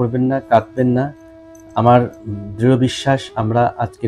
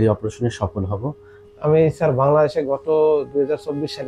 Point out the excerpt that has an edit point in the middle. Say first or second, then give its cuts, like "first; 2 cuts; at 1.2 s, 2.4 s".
second; 1 cut; at 1.4 s